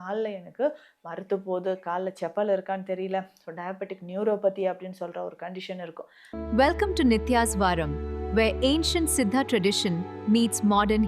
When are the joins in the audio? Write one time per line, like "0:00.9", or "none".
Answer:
0:06.1